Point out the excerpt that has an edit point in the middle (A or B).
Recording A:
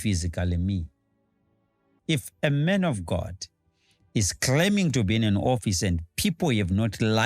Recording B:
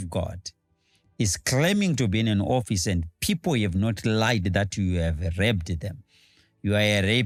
A